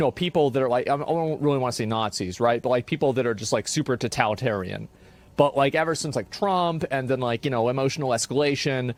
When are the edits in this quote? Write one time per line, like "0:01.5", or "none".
none

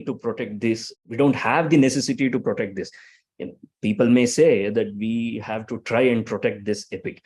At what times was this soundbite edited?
0:00.9

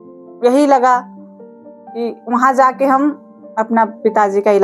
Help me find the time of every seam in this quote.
none

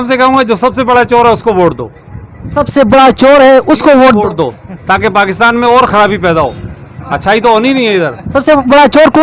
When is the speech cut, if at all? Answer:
none

